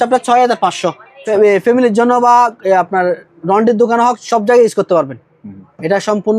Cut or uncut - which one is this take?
cut